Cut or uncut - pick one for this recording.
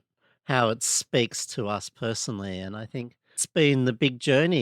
cut